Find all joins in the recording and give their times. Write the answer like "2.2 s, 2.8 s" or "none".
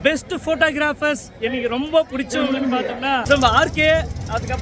3.2 s